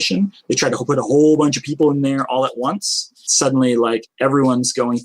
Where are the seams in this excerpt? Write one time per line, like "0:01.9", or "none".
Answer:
0:03.2